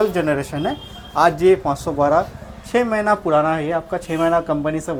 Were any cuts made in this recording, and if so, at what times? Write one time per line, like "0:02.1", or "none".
none